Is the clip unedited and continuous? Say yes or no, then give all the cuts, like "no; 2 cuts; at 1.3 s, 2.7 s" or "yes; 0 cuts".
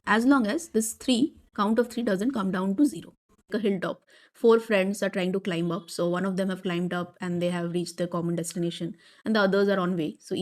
no; 1 cut; at 3.5 s